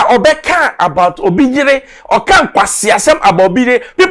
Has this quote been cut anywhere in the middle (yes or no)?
no